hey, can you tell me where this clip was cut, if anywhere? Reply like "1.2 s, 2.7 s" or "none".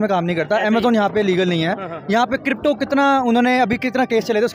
none